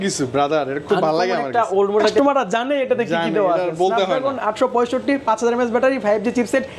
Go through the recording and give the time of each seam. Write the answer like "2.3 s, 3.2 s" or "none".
2.2 s